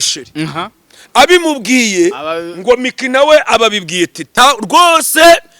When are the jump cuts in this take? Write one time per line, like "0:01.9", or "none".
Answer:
0:04.2

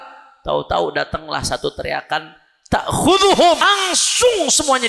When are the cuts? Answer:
0:03.6

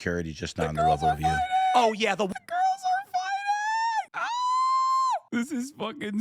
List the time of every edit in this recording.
0:04.2
0:05.1

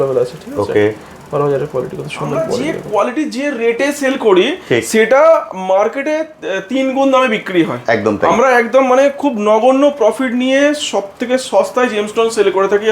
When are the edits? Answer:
0:02.7

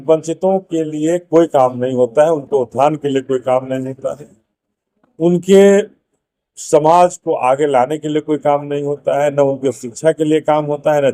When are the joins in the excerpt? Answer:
none

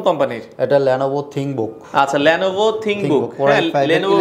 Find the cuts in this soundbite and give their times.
none

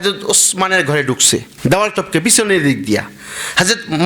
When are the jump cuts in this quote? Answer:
0:01.5

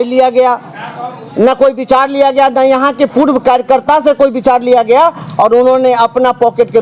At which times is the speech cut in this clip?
none

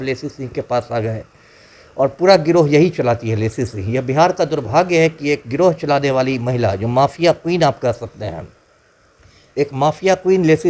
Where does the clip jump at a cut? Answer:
none

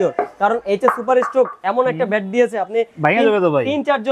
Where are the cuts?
none

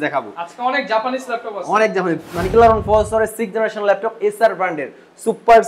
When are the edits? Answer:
0:02.5

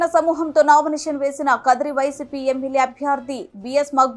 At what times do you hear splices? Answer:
none

